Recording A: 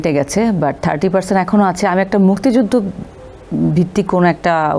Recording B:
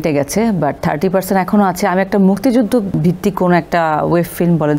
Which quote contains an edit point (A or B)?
B